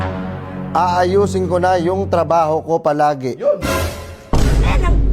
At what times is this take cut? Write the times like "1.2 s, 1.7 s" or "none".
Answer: none